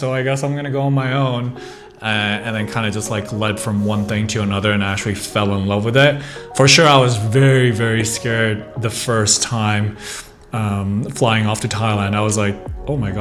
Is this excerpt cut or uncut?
uncut